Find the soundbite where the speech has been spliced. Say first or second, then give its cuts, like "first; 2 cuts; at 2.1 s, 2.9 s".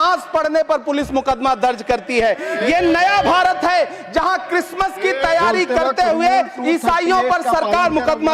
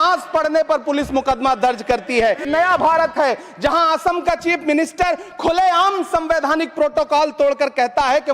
second; 1 cut; at 2.5 s